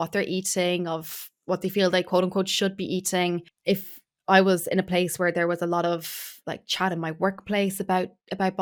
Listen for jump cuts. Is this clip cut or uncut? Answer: uncut